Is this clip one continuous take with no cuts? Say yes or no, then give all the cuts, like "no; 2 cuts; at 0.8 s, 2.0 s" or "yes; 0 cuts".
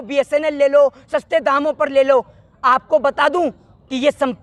yes; 0 cuts